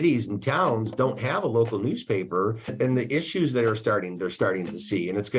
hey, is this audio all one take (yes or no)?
no